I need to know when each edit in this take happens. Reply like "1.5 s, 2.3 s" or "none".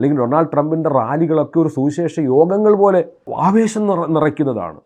3.3 s